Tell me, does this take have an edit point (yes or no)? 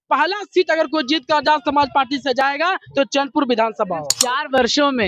yes